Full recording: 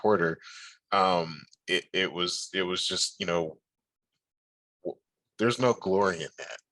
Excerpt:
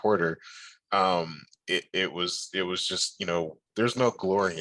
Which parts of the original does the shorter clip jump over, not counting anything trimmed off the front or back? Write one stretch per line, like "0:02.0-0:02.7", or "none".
0:03.6-0:05.2